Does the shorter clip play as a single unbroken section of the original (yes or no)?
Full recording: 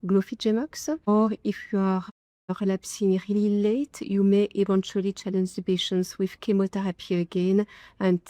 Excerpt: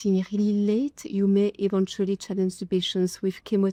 yes